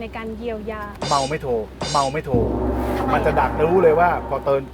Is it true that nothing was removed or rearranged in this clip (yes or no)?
no